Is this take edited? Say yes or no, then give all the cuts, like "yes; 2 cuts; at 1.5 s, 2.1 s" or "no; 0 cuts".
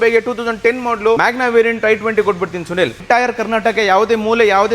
yes; 2 cuts; at 1.2 s, 3.0 s